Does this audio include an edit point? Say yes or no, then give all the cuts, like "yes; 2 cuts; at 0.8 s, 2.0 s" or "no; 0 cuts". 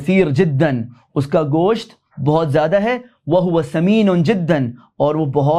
no; 0 cuts